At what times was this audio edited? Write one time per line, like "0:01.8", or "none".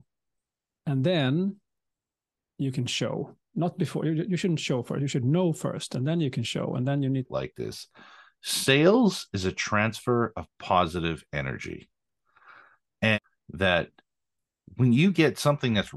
0:07.3
0:13.2